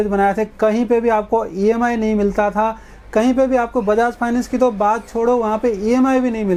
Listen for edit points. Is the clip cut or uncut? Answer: uncut